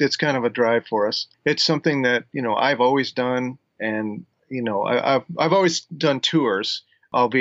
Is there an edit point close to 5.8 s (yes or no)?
no